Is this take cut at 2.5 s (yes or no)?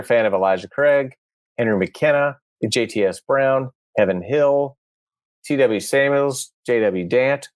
no